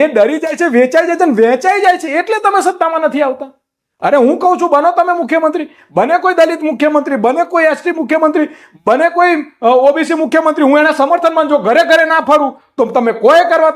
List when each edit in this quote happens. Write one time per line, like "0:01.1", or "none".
none